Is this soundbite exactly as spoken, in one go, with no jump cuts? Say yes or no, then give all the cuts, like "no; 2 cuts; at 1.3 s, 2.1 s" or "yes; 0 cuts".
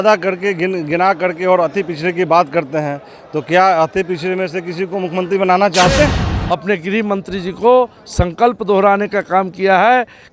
no; 1 cut; at 6.3 s